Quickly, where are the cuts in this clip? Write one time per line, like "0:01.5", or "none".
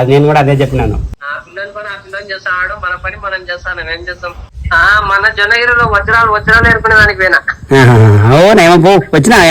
0:01.2
0:04.6